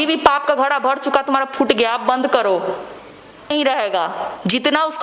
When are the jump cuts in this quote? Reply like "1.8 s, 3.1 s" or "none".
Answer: 3.5 s